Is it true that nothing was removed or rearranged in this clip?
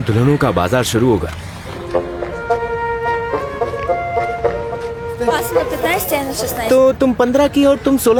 yes; 0 cuts

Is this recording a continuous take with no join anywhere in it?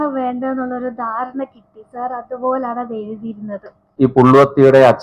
no; 1 cut; at 3.8 s

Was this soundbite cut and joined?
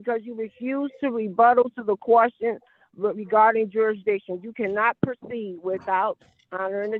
no; 0 cuts

